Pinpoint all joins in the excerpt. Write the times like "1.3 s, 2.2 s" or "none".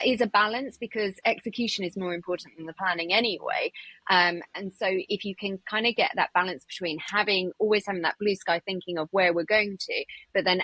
none